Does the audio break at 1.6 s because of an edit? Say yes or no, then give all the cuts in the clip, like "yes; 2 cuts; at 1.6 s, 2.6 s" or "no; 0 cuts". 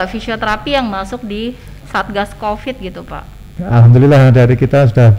no; 1 cut; at 3.5 s